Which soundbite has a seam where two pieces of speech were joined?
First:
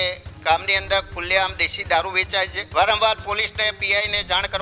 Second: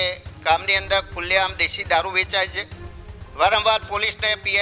first; 1 cut; at 2.6 s

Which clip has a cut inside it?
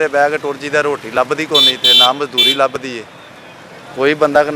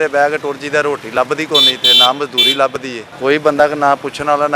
second; 1 cut; at 3.0 s

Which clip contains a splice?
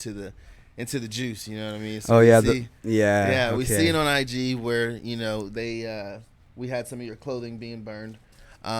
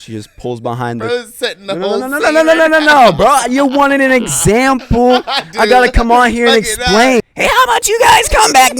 second; 1 cut; at 7.2 s

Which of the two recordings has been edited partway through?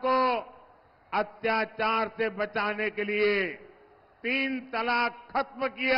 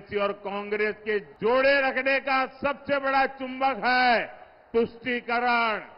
second; 1 cut; at 1.3 s

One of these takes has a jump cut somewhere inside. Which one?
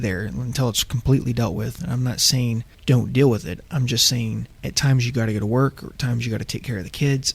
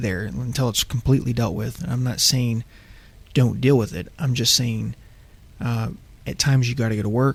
first; 2 cuts; at 2.7 s, 4.5 s

